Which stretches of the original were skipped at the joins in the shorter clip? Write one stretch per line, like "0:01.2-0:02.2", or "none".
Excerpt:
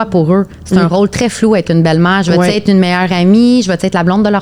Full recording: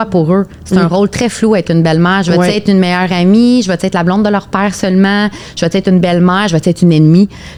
none

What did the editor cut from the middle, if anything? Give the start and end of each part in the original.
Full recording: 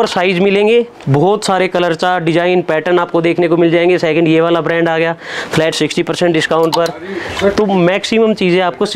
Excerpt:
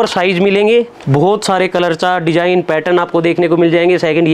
none

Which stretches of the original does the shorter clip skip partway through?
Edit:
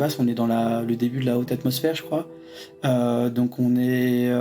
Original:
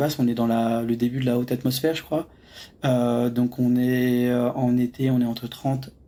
none

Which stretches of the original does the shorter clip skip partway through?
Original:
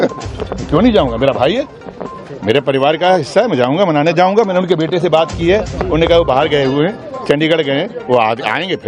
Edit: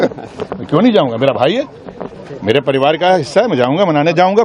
none

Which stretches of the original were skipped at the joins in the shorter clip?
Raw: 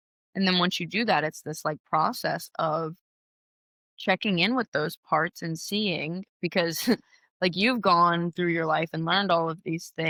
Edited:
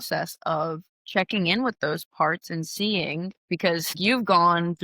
0:03.1-0:03.8
0:06.9-0:07.5

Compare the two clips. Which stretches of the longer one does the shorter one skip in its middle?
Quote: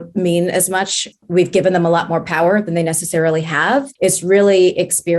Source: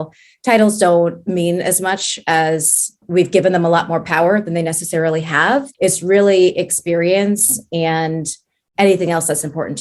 0:02.1-0:02.8

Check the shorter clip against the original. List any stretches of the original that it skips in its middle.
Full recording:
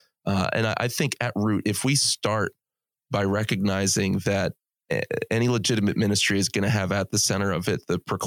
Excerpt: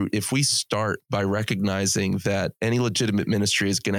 0:02.5-0:03.0
0:04.6-0:05.3

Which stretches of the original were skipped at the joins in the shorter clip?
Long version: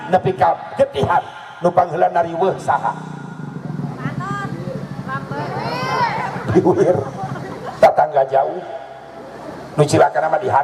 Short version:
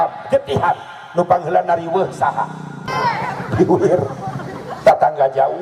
0:03.3-0:05.8

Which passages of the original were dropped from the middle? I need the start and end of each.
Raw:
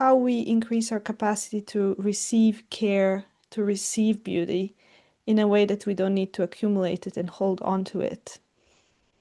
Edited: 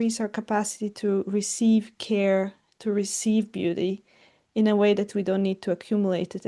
none

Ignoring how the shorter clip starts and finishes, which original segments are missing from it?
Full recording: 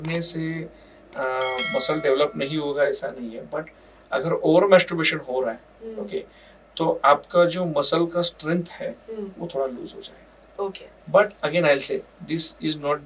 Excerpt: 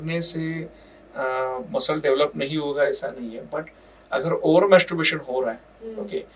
none

